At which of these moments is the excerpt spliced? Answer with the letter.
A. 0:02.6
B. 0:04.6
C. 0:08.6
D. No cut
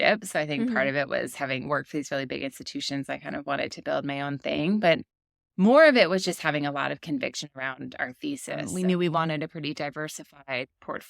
C